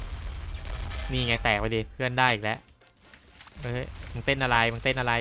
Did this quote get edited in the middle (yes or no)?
no